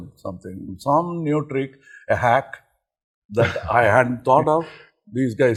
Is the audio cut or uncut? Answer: uncut